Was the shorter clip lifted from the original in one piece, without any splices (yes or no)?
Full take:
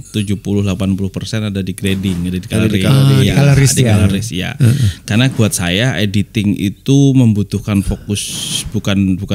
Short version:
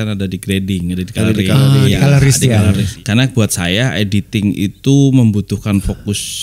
no